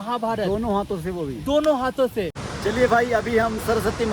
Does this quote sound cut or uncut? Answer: cut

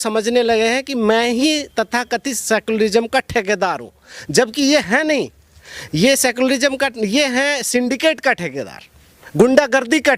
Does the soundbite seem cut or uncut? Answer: uncut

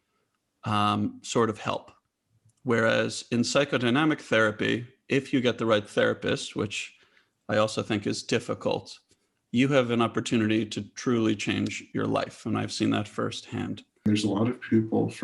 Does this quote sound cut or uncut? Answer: cut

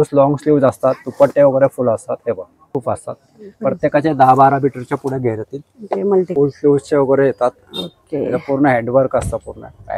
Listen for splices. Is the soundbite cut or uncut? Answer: cut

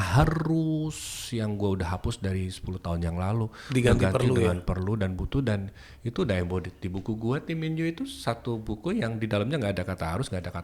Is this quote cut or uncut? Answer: uncut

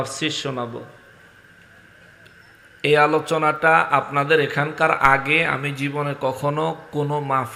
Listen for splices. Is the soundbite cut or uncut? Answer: uncut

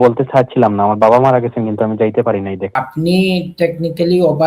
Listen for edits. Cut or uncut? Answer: cut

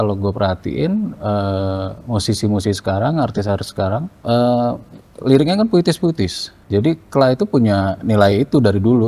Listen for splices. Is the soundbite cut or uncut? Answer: cut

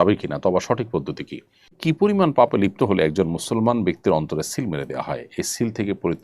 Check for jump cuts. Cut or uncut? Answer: cut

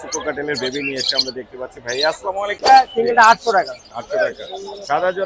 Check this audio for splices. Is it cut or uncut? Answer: cut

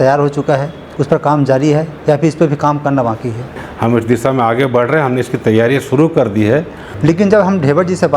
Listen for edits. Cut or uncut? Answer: cut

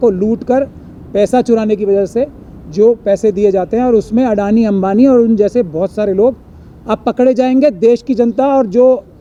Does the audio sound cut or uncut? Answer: uncut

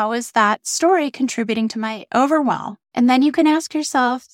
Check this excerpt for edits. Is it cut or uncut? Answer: cut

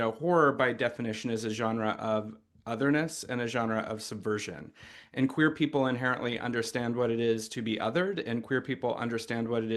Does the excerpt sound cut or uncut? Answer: uncut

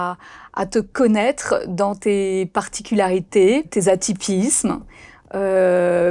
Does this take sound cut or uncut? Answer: cut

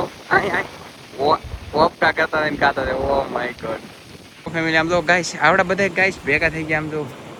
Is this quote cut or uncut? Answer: uncut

